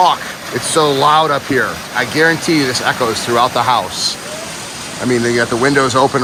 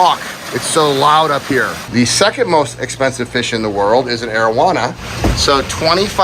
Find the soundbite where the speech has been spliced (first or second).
second